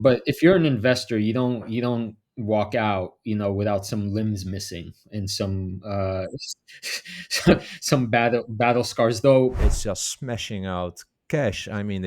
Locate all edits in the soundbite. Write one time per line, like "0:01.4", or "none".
0:09.6